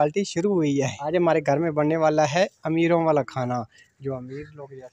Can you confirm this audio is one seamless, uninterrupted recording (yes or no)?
no